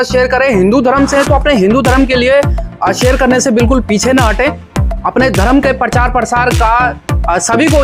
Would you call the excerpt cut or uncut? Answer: uncut